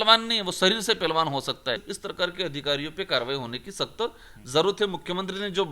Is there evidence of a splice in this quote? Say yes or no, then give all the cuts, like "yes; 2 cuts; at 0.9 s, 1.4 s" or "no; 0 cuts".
yes; 1 cut; at 2.0 s